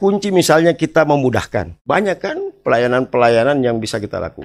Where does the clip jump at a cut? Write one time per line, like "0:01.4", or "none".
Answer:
0:01.7